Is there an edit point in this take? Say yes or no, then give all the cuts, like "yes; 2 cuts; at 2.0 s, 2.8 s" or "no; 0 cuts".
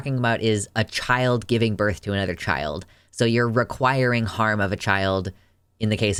no; 0 cuts